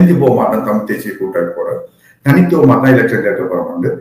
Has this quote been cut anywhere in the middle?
no; 0 cuts

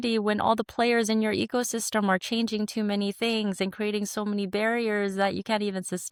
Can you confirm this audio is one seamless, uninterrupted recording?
yes; 0 cuts

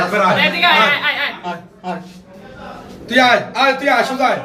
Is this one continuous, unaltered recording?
yes; 0 cuts

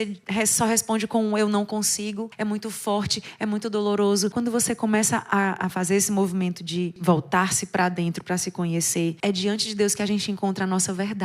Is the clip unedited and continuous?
no; 1 cut; at 9.2 s

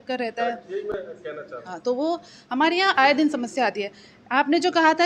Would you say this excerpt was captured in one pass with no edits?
yes; 0 cuts

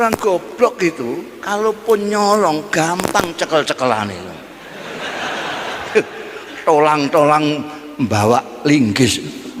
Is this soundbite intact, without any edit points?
yes; 0 cuts

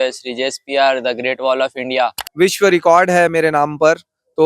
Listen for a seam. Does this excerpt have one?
yes; 1 cut; at 2.2 s

